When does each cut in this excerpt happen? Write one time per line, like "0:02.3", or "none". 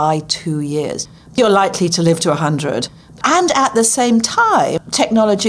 0:01.3
0:03.2
0:04.7